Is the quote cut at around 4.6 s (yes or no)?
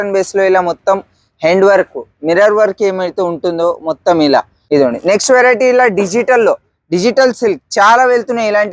yes